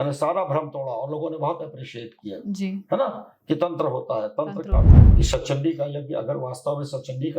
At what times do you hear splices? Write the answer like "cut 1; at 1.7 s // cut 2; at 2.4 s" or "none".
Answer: cut 1; at 5.0 s